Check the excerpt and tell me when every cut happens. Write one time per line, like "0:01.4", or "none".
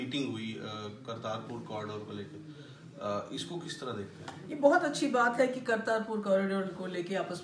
none